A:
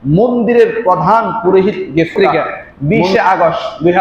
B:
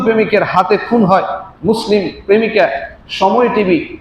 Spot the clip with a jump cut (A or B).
A